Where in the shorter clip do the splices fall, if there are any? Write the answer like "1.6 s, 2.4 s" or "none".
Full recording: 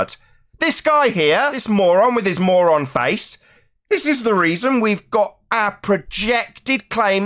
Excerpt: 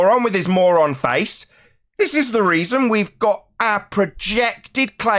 none